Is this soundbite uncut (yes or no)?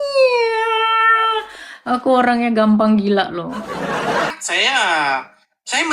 no